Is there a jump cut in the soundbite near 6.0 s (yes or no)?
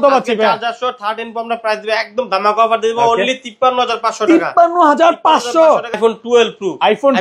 yes